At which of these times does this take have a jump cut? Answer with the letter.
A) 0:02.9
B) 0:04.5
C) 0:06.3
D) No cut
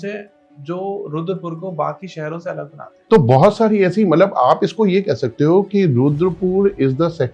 A